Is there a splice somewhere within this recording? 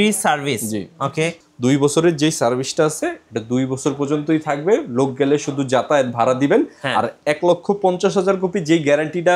yes; 1 cut; at 1.4 s

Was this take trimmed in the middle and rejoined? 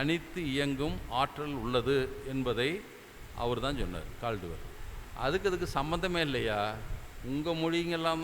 no; 0 cuts

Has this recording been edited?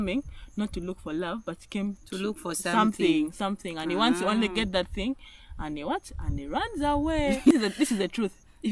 yes; 1 cut; at 7.5 s

